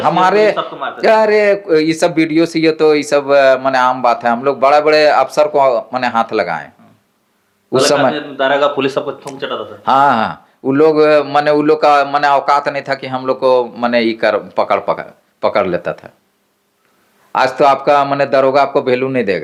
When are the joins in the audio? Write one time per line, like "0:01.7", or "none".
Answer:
none

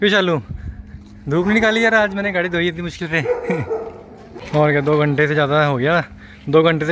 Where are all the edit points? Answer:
0:04.2

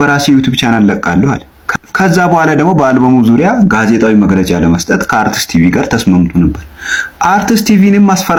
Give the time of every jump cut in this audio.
none

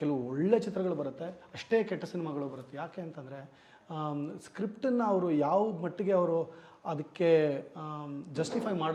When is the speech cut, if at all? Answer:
none

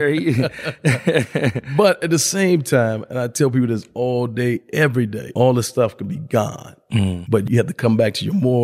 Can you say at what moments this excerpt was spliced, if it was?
0:05.2
0:07.5

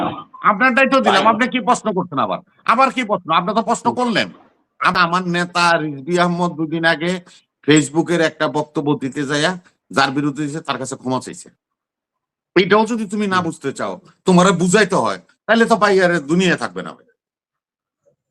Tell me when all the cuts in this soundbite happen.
0:04.9

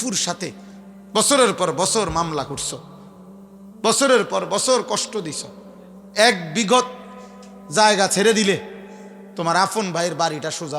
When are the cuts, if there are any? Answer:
none

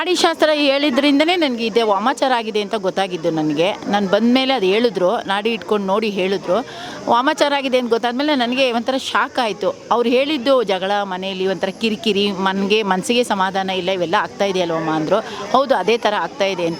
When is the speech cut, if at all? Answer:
none

